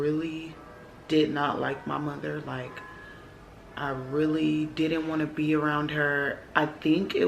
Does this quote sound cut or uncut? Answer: uncut